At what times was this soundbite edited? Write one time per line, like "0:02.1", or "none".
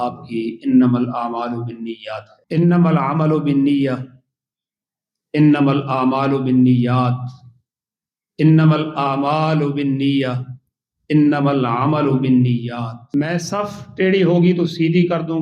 0:02.3
0:13.0